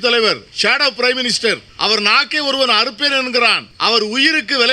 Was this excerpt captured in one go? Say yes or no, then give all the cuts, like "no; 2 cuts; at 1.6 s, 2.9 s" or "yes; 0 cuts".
no; 2 cuts; at 1.7 s, 3.7 s